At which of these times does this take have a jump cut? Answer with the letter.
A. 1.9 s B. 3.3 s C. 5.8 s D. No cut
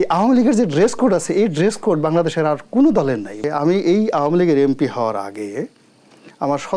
B